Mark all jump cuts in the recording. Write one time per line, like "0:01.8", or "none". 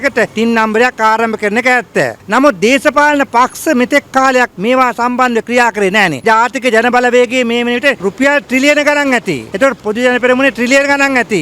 0:06.2